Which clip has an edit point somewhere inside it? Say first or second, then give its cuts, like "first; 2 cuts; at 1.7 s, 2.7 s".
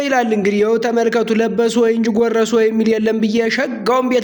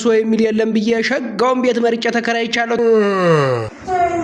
second; 1 cut; at 2.8 s